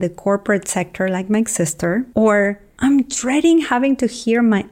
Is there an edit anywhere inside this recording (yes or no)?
yes